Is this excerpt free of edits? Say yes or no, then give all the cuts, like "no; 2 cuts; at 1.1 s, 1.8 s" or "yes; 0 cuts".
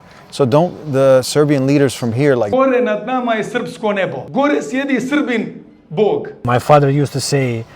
no; 2 cuts; at 2.5 s, 6.4 s